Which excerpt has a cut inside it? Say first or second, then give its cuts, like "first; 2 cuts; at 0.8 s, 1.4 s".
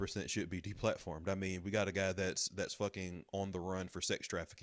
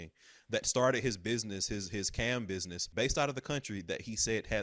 second; 1 cut; at 2.8 s